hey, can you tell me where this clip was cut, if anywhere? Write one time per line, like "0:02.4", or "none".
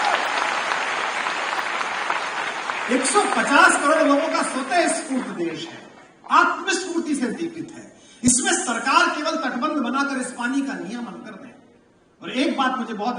none